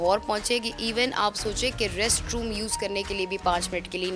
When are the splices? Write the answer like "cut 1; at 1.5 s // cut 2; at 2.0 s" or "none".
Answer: none

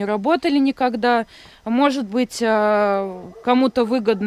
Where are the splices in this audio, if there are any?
none

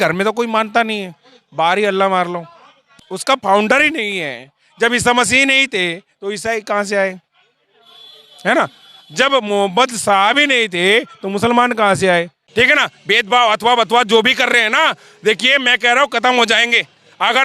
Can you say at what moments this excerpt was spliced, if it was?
cut 1; at 3.0 s // cut 2; at 12.4 s

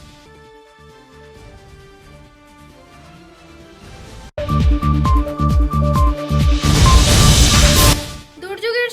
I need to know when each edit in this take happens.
cut 1; at 4.3 s

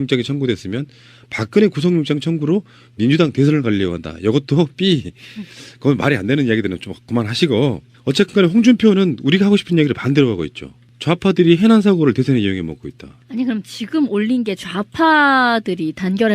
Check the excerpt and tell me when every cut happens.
cut 1; at 7.4 s

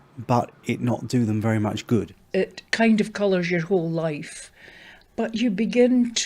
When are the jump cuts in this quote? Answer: cut 1; at 2.2 s

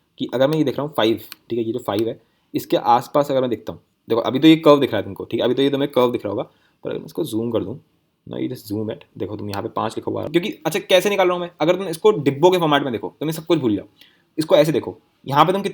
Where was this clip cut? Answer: cut 1; at 10.3 s

